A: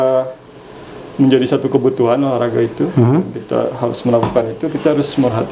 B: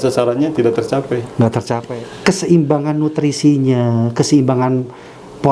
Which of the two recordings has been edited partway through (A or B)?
B